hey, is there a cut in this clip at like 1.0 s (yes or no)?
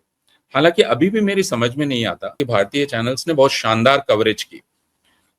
no